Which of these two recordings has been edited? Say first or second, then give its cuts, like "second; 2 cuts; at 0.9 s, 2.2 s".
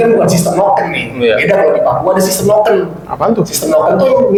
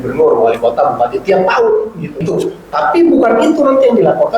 second; 1 cut; at 2.3 s